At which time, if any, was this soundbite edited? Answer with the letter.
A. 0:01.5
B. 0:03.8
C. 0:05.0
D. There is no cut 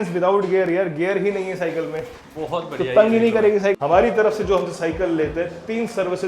B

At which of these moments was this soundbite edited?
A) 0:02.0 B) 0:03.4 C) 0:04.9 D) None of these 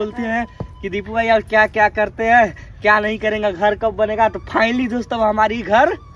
D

